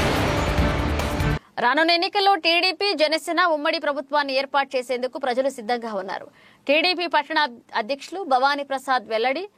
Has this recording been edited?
yes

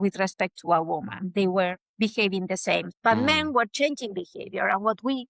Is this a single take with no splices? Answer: no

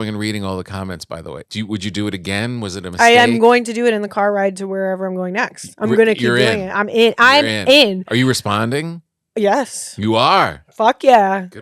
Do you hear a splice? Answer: yes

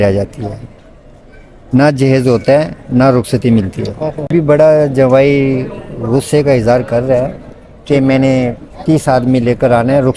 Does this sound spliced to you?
yes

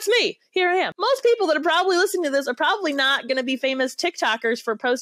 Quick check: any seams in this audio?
yes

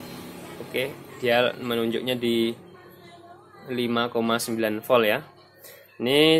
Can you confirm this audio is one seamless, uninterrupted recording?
yes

